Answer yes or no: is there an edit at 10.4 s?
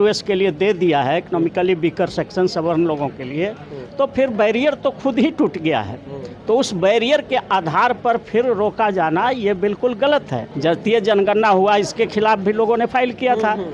yes